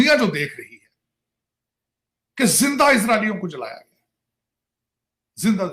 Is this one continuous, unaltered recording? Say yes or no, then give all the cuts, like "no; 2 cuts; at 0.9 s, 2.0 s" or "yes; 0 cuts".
yes; 0 cuts